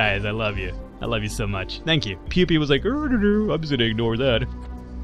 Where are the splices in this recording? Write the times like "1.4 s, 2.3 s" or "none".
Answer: 2.3 s